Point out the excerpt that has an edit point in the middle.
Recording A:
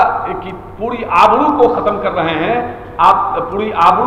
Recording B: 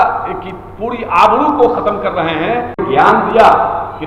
B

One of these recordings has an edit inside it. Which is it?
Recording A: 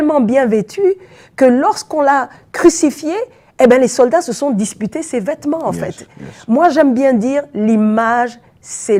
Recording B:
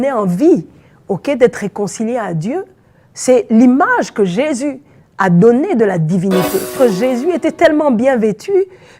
B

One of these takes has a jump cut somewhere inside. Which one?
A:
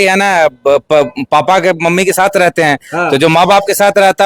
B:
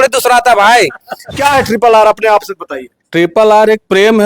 B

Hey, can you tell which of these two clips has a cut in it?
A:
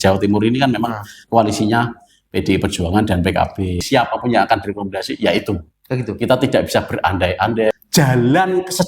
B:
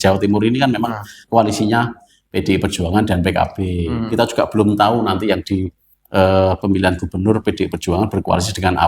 A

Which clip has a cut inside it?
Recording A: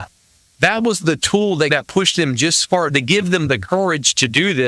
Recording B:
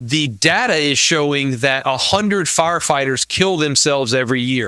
A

